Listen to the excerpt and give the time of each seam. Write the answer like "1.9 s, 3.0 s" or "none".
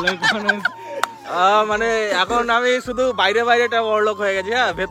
none